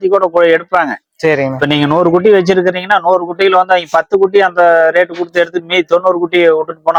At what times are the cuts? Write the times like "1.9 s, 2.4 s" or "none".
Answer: none